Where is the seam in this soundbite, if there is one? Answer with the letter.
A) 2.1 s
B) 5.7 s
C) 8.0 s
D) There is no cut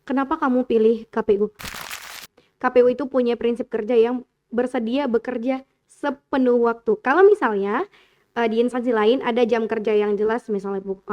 A